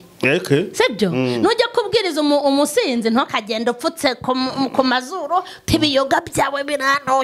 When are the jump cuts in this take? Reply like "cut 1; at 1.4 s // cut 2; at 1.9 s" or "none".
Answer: none